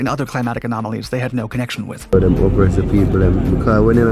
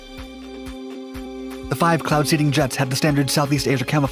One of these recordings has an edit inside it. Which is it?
first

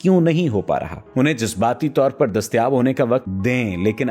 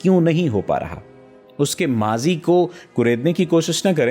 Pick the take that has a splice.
first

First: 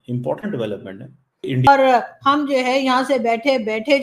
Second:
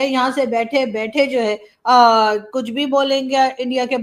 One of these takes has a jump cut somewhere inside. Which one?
first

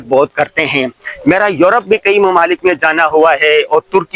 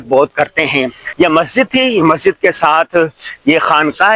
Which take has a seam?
second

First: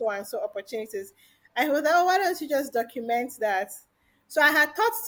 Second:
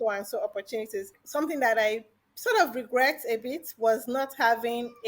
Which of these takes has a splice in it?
second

